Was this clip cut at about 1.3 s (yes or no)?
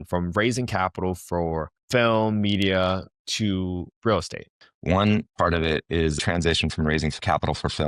no